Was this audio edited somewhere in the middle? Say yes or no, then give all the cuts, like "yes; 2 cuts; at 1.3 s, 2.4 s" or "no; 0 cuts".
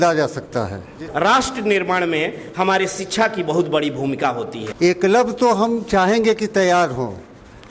yes; 2 cuts; at 1.0 s, 4.6 s